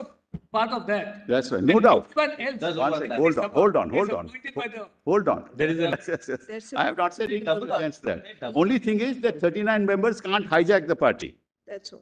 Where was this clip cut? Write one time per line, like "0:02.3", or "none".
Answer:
0:05.9